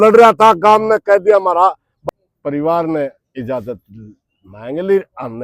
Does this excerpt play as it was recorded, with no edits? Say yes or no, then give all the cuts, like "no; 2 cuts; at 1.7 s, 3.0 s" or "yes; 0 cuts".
no; 1 cut; at 1.9 s